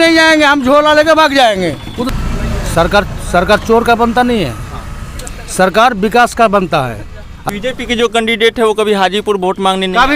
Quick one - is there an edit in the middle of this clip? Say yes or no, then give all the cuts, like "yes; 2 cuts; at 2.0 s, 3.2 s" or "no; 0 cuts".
yes; 2 cuts; at 2.1 s, 7.6 s